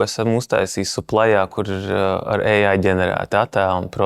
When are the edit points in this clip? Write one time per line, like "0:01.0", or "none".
none